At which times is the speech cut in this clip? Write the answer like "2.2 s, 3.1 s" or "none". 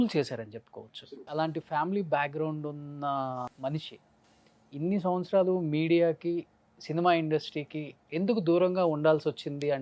1.2 s, 3.5 s